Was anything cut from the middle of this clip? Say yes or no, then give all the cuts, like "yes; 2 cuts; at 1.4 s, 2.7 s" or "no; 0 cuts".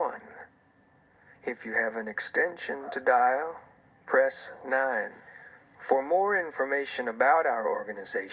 no; 0 cuts